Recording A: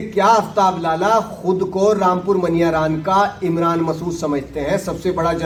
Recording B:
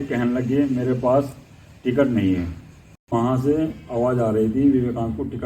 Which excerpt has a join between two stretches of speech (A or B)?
B